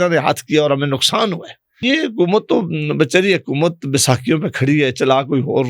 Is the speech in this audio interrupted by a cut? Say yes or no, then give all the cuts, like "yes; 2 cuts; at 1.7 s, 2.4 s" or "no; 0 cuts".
yes; 1 cut; at 1.8 s